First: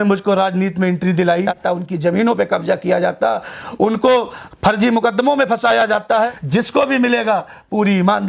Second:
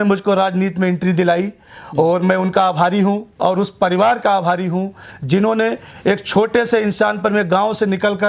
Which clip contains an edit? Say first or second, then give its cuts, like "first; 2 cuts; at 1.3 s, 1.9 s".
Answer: first; 2 cuts; at 1.5 s, 6.4 s